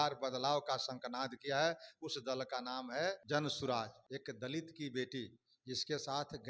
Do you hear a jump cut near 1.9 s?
no; 2 cuts; at 3.2 s, 4.0 s

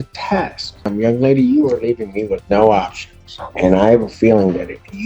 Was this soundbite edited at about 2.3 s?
no; 1 cut; at 0.9 s

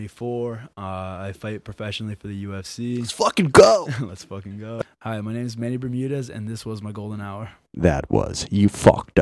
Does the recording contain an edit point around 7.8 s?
no; 1 cut; at 4.8 s

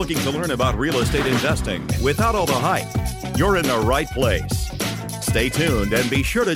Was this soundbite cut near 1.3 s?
no; 0 cuts

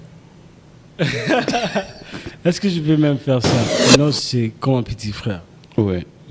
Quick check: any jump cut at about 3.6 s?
yes; 1 cut; at 3.6 s

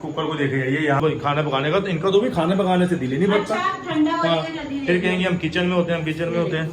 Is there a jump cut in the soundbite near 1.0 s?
yes; 1 cut; at 1.0 s

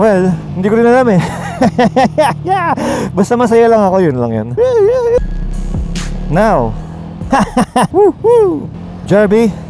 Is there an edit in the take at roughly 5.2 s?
yes; 1 cut; at 5.2 s

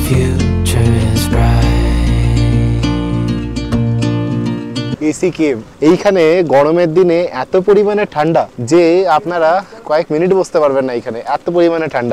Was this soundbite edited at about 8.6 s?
yes; 3 cuts; at 5.3 s, 8.6 s, 9.8 s

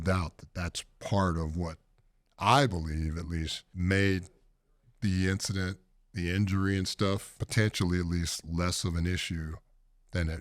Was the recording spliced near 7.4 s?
yes; 2 cuts; at 3.6 s, 7.4 s

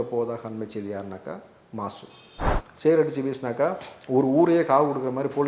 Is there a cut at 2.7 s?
yes; 1 cut; at 2.7 s

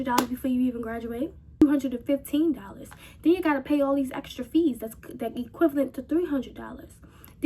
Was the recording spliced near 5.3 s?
no; 1 cut; at 1.6 s

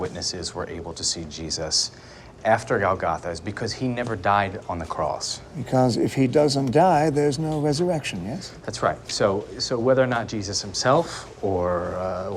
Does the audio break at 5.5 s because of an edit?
no; 0 cuts

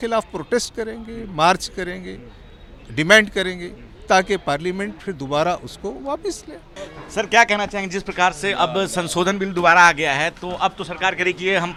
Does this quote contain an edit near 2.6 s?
no; 0 cuts

